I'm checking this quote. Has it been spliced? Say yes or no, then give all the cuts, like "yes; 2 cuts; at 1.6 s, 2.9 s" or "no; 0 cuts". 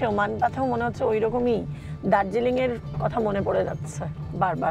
no; 0 cuts